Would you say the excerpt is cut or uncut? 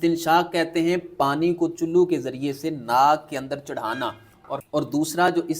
cut